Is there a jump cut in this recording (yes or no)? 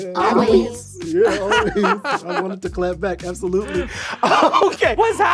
no